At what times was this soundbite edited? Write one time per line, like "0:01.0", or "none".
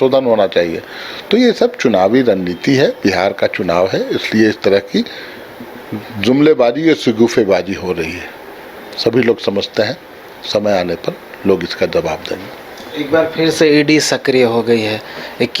none